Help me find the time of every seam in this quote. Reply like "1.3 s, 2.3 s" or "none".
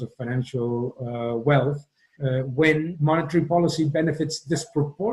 2.9 s